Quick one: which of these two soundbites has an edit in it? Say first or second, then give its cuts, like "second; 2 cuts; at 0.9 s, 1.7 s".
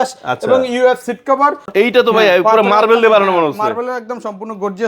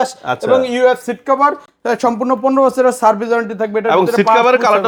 first; 1 cut; at 1.7 s